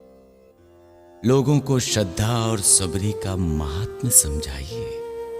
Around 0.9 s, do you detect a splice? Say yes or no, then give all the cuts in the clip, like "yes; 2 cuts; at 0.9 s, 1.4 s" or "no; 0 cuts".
yes; 1 cut; at 0.9 s